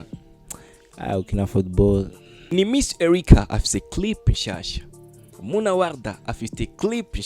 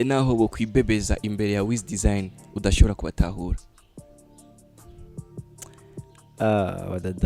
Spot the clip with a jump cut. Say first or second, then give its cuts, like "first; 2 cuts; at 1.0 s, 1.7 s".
first; 1 cut; at 2.4 s